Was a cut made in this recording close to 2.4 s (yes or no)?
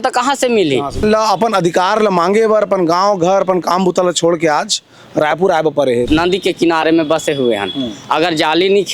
no